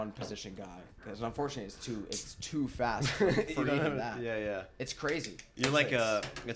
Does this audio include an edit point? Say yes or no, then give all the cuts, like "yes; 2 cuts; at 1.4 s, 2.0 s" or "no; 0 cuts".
no; 0 cuts